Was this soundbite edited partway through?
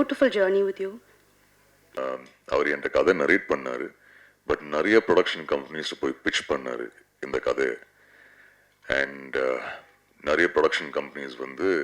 yes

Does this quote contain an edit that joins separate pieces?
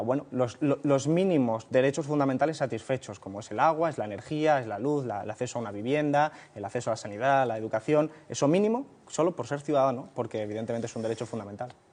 no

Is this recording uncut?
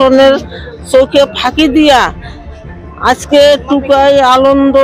yes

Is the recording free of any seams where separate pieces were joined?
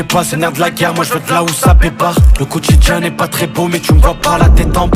yes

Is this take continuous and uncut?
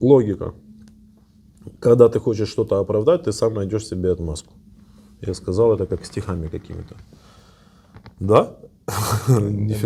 yes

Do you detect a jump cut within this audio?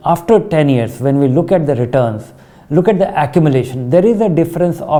no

